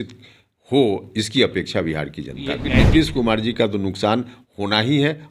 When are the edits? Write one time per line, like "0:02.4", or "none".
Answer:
0:02.8